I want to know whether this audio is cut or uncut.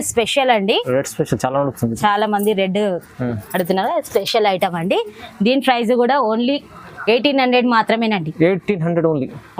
uncut